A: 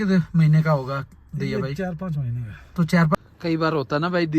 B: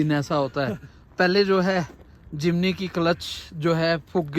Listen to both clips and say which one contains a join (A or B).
A